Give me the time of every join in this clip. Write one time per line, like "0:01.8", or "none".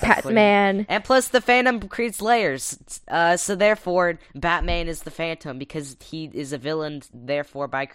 0:00.9